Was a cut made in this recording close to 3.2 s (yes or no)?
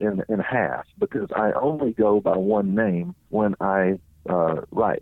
yes